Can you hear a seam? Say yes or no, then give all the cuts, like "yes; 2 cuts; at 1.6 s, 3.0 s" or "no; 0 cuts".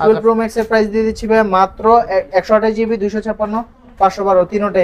no; 0 cuts